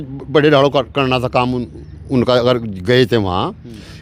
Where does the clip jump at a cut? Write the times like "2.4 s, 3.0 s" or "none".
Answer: none